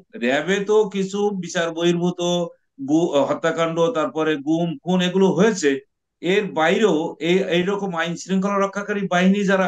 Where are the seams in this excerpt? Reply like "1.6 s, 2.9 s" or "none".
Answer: none

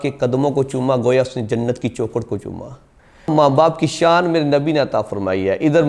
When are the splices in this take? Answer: 3.3 s

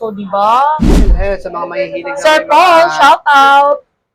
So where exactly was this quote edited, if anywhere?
1.1 s

